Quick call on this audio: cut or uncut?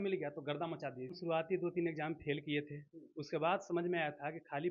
cut